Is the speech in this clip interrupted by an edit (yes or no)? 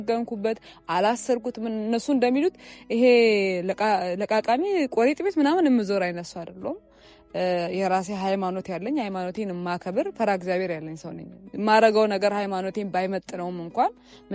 no